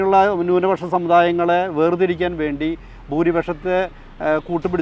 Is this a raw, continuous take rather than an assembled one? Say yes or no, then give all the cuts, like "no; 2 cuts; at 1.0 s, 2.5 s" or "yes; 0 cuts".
yes; 0 cuts